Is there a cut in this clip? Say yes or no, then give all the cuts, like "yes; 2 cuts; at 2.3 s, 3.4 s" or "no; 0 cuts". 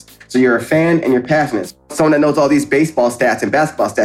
yes; 1 cut; at 1.8 s